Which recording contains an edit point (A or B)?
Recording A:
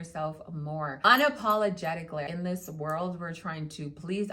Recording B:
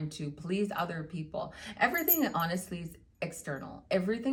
A